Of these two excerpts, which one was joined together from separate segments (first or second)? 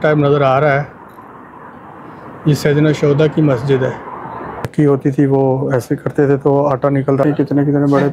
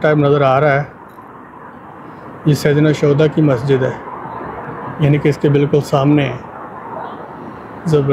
first